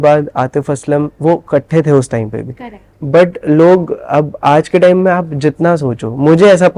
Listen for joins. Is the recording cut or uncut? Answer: uncut